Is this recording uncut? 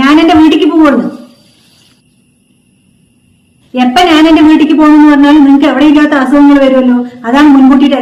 yes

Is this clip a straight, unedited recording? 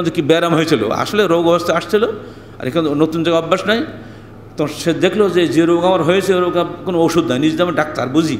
yes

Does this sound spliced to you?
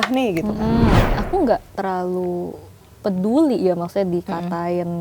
yes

